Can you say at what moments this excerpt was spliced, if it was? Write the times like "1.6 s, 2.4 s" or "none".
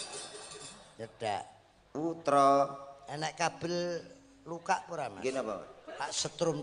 none